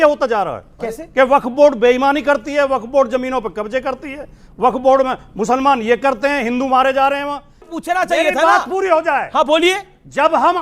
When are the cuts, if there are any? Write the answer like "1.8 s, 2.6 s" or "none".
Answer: 7.7 s